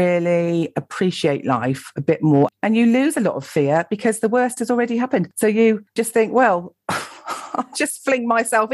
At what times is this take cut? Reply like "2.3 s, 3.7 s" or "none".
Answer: 2.5 s